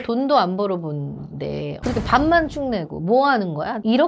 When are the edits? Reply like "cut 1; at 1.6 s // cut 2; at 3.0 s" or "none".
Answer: cut 1; at 1.8 s